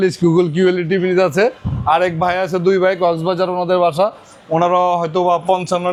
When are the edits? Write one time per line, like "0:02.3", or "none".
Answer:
none